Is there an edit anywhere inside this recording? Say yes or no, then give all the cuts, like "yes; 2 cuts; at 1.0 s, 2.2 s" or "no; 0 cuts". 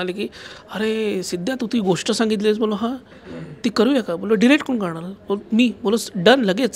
no; 0 cuts